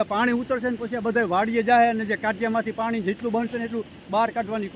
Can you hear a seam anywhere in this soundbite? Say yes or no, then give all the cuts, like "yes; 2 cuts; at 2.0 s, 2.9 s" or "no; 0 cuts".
no; 0 cuts